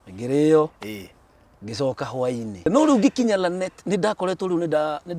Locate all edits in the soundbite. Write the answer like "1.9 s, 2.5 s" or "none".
2.7 s